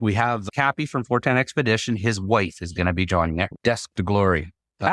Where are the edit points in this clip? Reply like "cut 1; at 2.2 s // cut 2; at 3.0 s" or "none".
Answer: cut 1; at 3.5 s